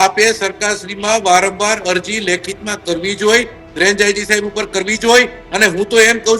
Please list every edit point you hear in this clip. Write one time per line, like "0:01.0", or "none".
none